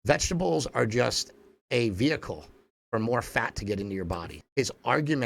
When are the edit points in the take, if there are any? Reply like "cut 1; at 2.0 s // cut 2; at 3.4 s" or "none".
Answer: cut 1; at 4.3 s